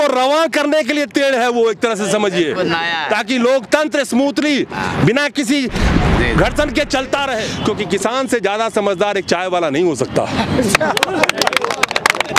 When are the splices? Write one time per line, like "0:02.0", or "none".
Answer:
0:07.5